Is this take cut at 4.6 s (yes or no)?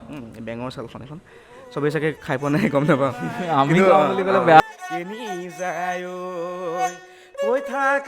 yes